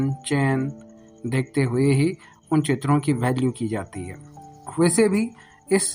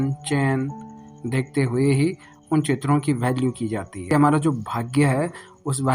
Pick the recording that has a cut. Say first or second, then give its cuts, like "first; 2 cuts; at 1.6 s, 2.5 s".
second; 1 cut; at 4.1 s